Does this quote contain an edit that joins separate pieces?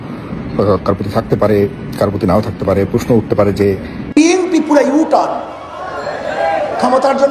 yes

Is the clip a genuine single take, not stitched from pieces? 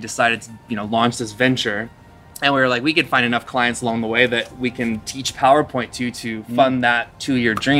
no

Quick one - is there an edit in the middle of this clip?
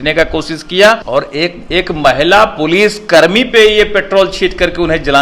yes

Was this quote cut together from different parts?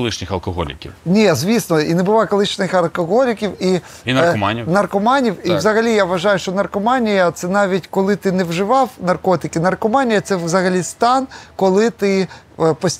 no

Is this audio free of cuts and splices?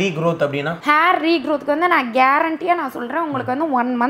yes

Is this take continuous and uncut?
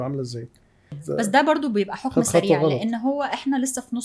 no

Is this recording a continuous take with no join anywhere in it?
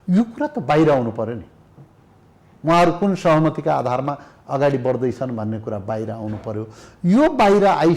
yes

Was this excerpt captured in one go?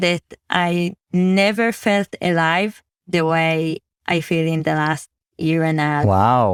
yes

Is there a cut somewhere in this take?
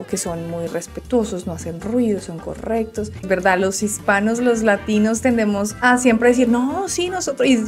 yes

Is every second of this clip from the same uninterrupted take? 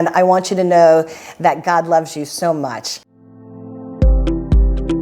no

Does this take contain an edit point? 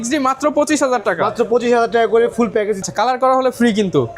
yes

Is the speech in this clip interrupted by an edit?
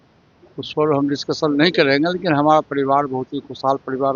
no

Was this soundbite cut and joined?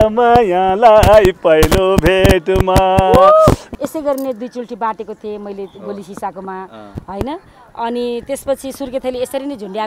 yes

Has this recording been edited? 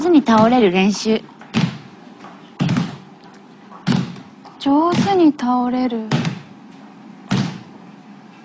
yes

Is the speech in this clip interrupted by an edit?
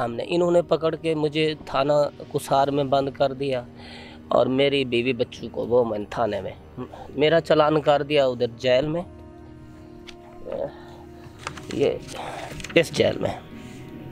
no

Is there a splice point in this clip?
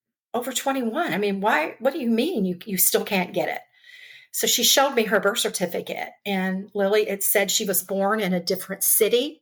no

